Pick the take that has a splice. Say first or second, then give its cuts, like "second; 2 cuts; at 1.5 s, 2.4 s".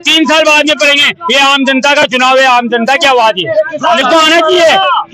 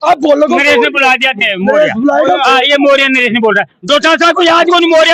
first; 1 cut; at 4.0 s